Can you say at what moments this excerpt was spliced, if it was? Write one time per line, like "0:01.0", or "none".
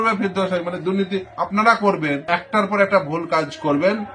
0:02.2